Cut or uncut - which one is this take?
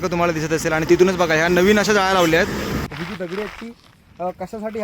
cut